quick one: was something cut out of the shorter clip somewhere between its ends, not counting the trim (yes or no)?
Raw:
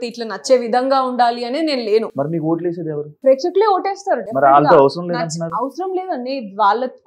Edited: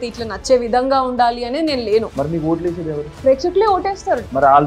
no